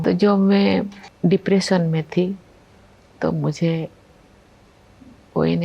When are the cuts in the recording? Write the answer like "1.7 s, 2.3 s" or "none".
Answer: 1.0 s